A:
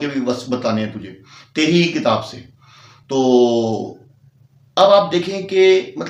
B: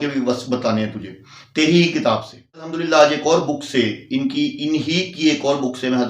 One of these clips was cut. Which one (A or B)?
B